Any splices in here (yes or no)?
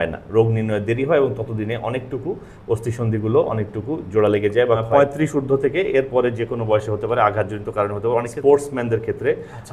yes